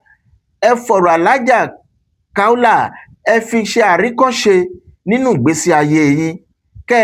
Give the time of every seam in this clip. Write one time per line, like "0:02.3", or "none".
none